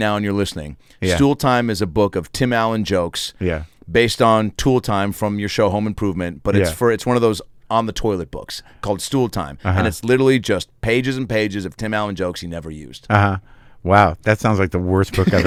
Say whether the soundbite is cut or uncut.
uncut